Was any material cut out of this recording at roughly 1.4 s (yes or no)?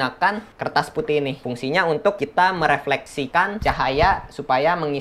yes